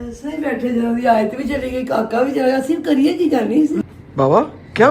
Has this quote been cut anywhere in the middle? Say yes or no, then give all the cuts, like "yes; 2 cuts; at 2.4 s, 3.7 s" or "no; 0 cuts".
yes; 1 cut; at 3.8 s